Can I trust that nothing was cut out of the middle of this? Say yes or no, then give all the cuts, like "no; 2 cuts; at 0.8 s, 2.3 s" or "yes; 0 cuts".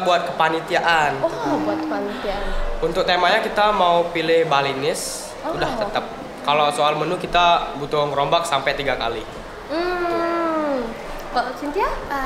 yes; 0 cuts